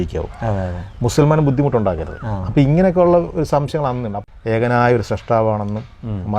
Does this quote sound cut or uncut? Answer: cut